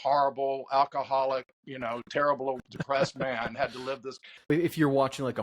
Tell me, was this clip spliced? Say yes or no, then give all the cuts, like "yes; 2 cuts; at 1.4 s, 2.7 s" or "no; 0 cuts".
yes; 1 cut; at 4.5 s